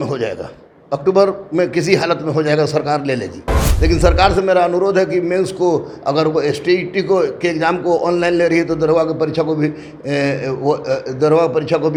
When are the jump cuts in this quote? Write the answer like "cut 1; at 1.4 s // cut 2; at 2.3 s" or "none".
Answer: none